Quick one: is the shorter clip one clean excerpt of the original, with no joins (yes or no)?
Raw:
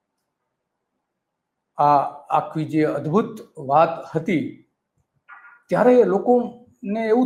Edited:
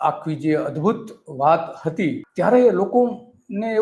no